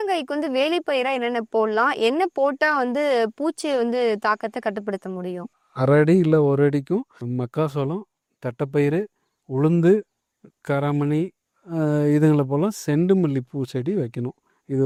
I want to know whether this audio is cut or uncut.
uncut